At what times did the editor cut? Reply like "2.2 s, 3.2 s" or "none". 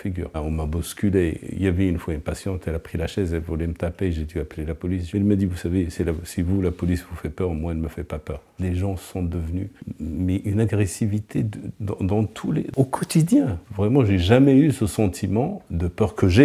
8.5 s, 9.8 s, 13.7 s